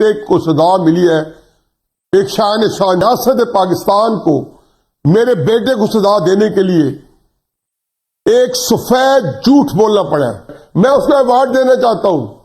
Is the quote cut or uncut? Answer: cut